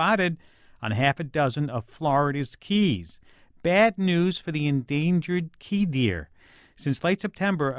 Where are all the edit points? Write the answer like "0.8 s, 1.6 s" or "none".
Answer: 3.2 s